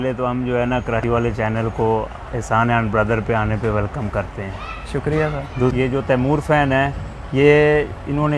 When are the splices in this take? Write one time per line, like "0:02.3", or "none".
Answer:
0:01.0
0:05.7